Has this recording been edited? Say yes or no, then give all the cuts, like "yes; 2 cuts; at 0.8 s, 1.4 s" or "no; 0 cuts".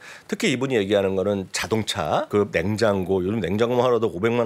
yes; 1 cut; at 2.3 s